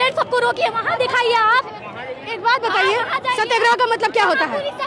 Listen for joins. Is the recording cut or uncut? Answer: uncut